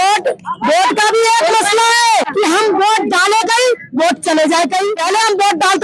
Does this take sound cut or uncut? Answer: cut